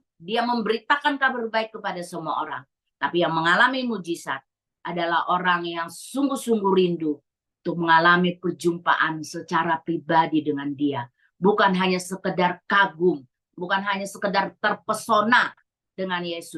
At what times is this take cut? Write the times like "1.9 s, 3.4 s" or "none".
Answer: 13.4 s